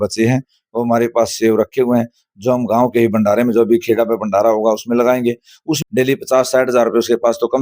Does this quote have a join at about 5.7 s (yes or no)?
yes